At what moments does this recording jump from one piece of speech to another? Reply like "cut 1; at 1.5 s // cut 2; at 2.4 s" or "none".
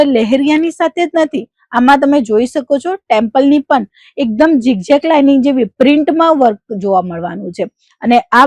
none